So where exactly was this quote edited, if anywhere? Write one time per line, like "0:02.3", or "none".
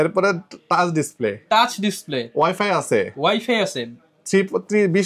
none